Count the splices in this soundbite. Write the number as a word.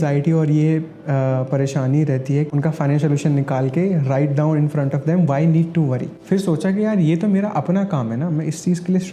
two